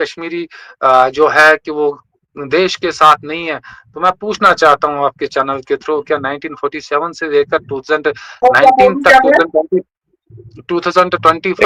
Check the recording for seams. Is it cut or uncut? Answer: uncut